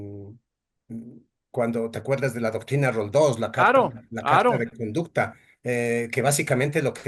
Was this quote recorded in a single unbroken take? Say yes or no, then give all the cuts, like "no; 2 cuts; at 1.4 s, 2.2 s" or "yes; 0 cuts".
yes; 0 cuts